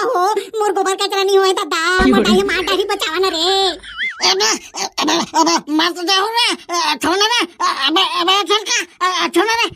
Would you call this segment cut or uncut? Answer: cut